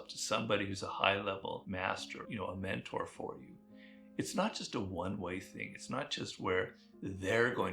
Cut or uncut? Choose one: cut